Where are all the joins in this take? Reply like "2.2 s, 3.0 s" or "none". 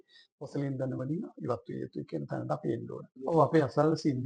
3.2 s